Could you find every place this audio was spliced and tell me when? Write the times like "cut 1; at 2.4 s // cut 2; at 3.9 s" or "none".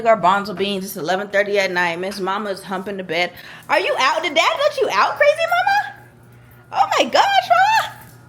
none